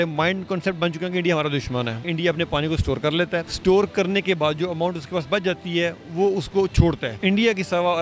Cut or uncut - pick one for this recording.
cut